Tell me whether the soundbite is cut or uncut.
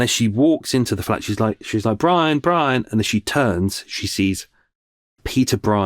cut